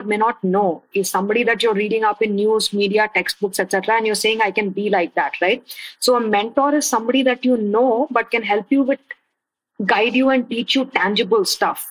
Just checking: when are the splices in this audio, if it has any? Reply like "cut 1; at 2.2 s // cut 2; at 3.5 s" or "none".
none